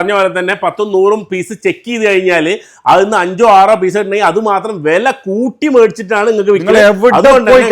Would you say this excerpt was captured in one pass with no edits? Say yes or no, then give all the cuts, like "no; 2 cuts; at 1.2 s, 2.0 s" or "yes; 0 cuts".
yes; 0 cuts